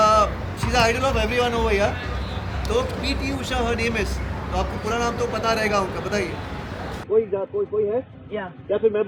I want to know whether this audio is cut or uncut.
uncut